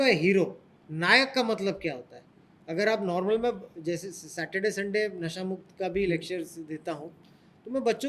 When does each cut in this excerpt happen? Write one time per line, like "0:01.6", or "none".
none